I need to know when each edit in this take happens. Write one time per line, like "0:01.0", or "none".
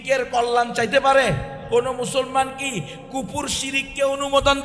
0:01.5